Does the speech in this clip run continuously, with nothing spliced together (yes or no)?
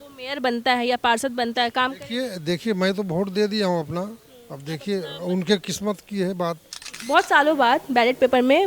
no